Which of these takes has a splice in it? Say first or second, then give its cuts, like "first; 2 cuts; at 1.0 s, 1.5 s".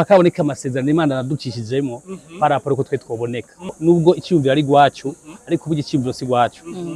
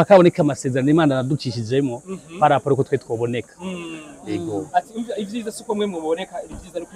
first; 1 cut; at 3.8 s